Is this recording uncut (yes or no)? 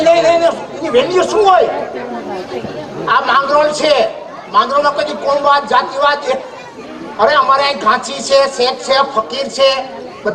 yes